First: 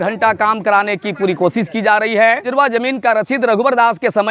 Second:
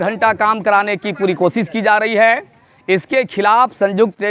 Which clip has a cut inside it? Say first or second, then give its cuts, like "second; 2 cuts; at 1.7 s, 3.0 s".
first; 1 cut; at 2.5 s